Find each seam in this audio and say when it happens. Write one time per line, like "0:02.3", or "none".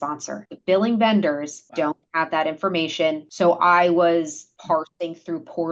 0:01.6
0:03.3
0:04.5